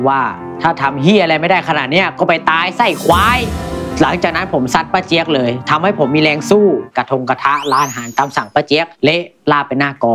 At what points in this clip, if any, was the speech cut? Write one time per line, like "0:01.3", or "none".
none